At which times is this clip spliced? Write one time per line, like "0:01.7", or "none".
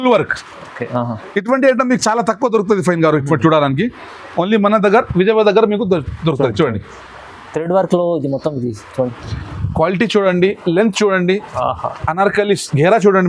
0:09.2